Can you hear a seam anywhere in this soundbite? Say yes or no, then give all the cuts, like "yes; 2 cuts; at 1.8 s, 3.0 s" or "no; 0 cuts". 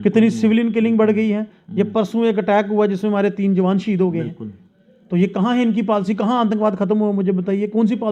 no; 0 cuts